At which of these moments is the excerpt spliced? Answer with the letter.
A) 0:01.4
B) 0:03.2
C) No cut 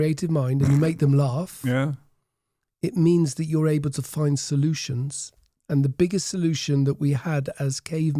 C